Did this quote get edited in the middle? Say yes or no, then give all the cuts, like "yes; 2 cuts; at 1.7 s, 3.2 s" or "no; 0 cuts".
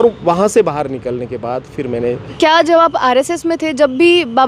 yes; 1 cut; at 2.3 s